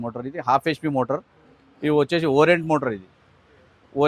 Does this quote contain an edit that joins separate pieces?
no; 0 cuts

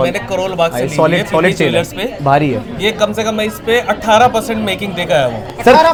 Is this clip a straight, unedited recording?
yes; 0 cuts

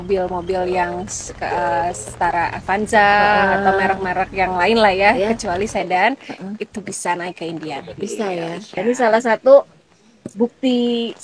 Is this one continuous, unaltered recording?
no; 1 cut; at 8.8 s

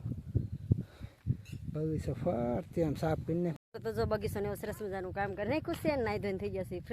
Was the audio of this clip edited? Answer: yes; 1 cut; at 3.6 s

